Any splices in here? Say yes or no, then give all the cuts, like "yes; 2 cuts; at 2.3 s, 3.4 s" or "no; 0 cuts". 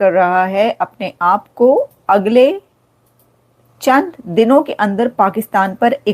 no; 0 cuts